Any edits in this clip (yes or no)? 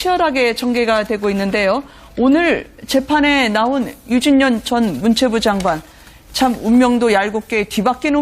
yes